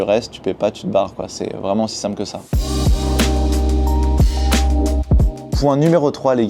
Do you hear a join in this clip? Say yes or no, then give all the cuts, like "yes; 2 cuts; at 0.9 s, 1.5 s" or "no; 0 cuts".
no; 0 cuts